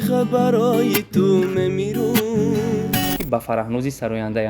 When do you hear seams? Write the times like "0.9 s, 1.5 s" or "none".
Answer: 3.2 s